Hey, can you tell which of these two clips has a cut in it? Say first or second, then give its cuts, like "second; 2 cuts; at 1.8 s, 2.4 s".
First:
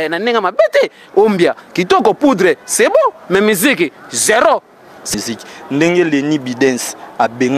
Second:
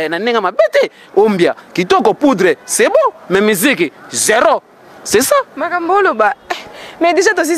first; 1 cut; at 5.0 s